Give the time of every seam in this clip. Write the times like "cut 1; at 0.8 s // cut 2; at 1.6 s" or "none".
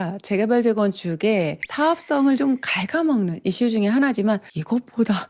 none